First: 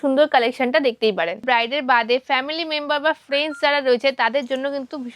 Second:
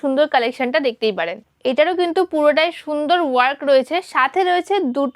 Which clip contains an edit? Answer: first; 1 cut; at 1.4 s

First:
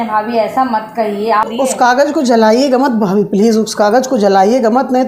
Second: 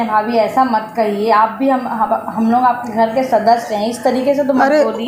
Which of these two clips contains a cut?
first; 1 cut; at 1.5 s

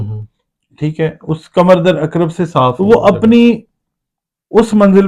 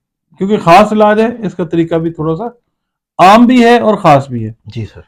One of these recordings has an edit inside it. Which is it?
first; 1 cut; at 2.8 s

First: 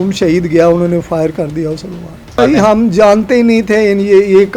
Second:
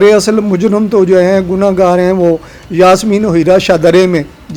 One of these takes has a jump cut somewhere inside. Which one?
first; 1 cut; at 2.4 s

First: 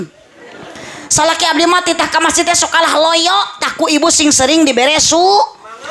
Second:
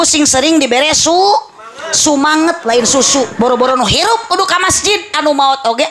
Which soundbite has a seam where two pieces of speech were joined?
second; 1 cut; at 3.3 s

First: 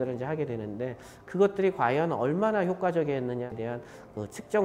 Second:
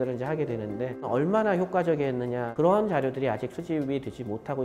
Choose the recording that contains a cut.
second; 2 cuts; at 1.1 s, 2.5 s

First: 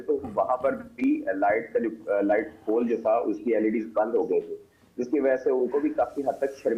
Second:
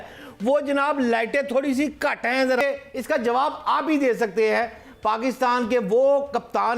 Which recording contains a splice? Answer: second; 1 cut; at 2.6 s

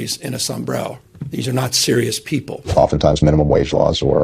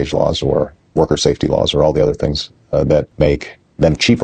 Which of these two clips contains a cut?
first; 2 cuts; at 1.1 s, 2.6 s

